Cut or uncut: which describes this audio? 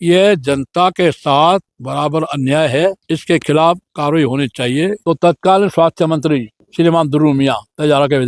cut